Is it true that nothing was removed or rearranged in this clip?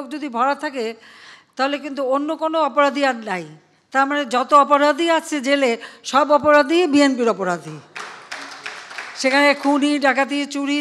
yes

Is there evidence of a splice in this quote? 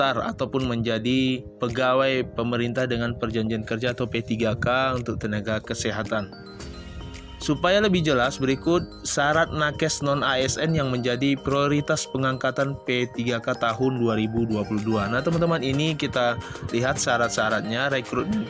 no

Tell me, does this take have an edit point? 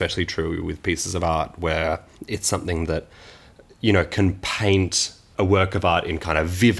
yes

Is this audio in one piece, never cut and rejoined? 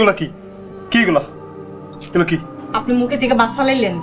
no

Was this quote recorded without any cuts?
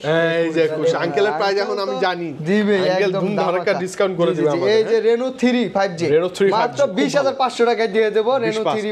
yes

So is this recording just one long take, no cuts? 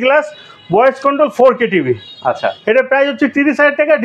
yes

